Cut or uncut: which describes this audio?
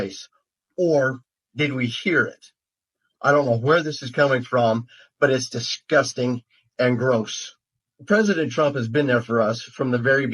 cut